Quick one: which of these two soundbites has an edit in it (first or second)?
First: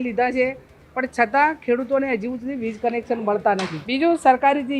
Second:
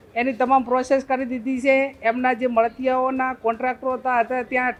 first